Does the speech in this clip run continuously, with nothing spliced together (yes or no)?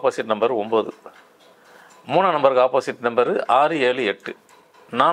yes